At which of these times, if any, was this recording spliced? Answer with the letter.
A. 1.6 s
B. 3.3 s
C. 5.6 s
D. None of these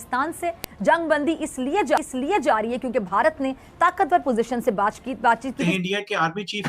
C